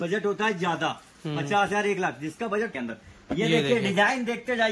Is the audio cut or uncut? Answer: cut